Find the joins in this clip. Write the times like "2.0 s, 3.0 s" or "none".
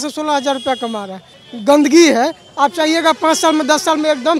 1.3 s